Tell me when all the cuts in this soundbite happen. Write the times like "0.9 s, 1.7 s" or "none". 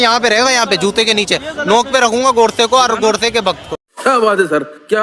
3.8 s

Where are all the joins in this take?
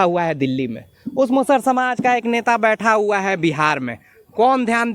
none

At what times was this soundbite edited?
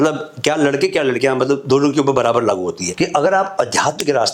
2.9 s

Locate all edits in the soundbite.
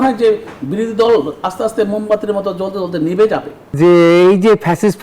3.6 s

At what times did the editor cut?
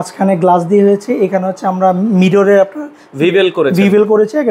none

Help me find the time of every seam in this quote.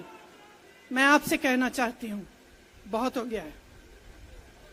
none

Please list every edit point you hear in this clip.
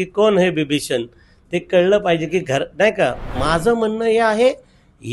3.4 s

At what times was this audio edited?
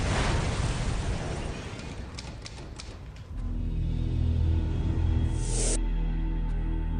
5.4 s

